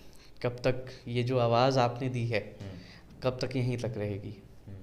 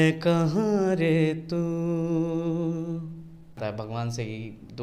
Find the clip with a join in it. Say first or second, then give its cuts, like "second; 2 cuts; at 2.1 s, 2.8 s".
second; 1 cut; at 3.6 s